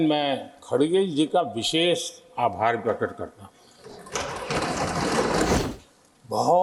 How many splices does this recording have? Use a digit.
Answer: 1